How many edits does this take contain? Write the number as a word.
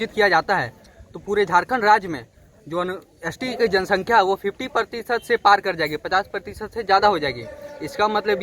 zero